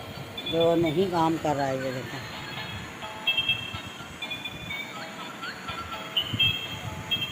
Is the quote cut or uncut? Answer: uncut